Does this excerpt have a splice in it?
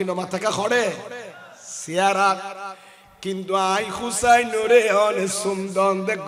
no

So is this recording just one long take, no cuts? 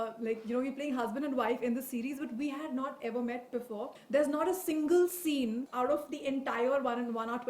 no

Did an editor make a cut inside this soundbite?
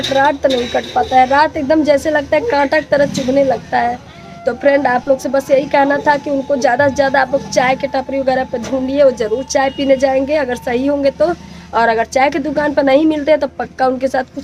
no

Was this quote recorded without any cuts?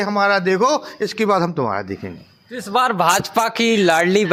yes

